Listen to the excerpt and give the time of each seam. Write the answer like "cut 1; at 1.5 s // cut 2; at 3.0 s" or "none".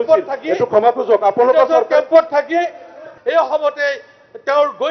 cut 1; at 3.1 s